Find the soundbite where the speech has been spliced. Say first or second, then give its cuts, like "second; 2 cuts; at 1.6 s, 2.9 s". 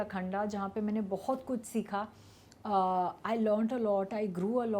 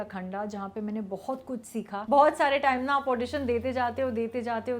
second; 1 cut; at 2.0 s